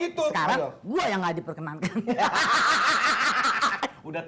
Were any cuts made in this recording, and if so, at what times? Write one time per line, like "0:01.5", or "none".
none